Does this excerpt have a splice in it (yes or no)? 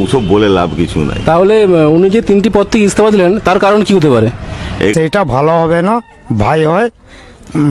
yes